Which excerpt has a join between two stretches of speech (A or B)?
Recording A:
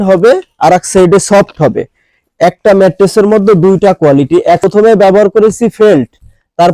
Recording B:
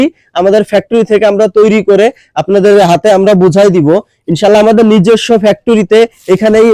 A